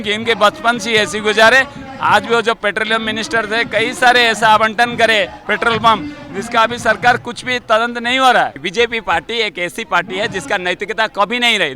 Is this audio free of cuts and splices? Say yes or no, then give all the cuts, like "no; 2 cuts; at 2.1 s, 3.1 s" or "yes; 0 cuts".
no; 1 cut; at 8.6 s